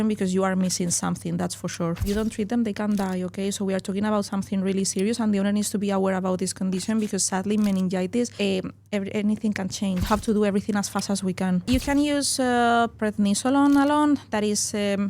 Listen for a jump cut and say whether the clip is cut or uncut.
cut